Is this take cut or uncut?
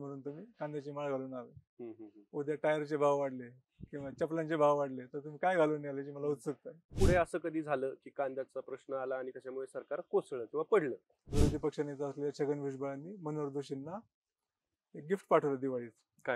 cut